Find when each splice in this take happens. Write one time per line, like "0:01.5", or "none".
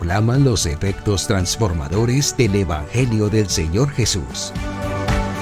0:04.4